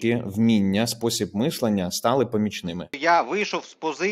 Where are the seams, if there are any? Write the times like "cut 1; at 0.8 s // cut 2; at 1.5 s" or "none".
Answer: cut 1; at 3.0 s